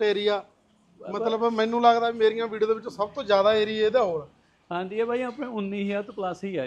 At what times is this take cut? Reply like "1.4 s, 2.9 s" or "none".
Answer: none